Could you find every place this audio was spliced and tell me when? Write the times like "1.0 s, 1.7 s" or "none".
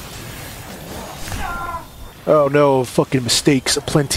2.1 s